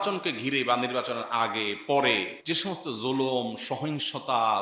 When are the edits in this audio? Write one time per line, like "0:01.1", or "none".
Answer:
0:02.3